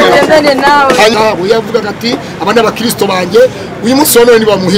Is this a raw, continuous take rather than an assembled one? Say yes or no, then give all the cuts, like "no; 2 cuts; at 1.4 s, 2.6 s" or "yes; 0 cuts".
no; 1 cut; at 1.1 s